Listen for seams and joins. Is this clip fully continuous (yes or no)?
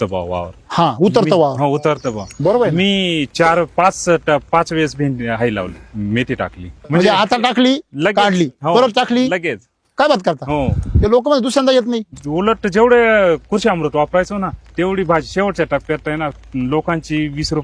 no